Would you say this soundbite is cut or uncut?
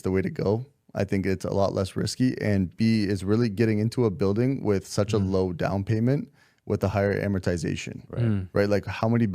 uncut